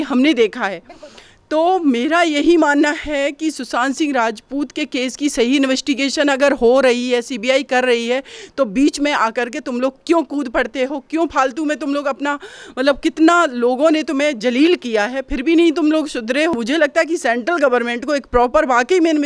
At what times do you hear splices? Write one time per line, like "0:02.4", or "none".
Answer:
0:16.6